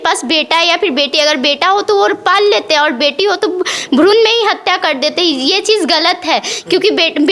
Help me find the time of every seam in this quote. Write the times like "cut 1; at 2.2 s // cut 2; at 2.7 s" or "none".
none